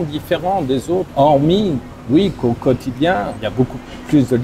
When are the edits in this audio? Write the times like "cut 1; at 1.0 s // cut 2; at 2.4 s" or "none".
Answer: cut 1; at 1.1 s // cut 2; at 3.4 s